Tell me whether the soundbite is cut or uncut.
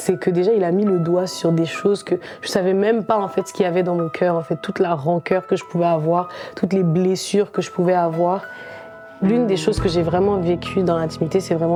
uncut